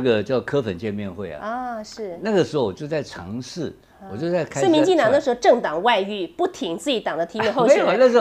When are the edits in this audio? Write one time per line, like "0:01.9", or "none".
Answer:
none